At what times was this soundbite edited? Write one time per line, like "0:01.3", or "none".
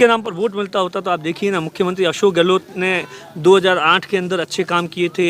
none